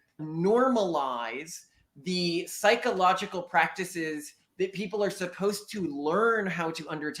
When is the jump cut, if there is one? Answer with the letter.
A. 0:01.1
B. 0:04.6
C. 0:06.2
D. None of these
D